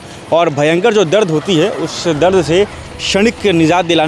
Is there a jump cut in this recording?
no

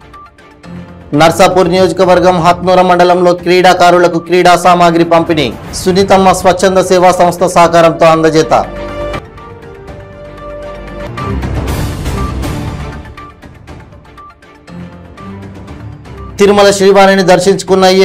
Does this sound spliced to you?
no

